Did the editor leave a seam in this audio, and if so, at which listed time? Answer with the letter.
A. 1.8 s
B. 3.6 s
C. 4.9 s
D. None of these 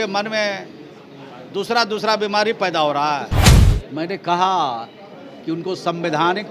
B